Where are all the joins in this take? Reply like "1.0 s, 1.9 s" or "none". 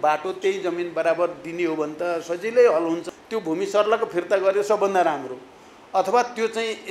3.1 s